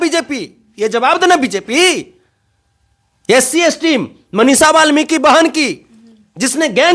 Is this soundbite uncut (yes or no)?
yes